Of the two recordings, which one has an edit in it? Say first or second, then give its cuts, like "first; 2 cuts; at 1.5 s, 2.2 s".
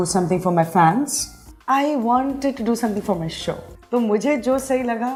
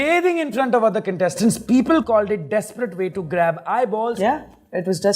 second; 1 cut; at 4.1 s